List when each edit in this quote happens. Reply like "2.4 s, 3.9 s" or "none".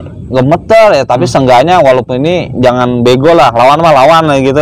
none